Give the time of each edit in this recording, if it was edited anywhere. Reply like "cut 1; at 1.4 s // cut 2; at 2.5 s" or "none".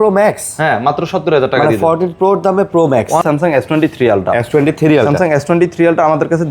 cut 1; at 3.2 s